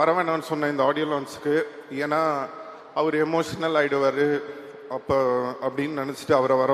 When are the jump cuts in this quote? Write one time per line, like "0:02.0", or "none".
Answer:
none